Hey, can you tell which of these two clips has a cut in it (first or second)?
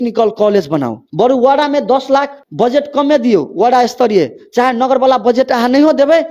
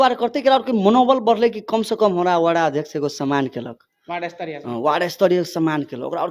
first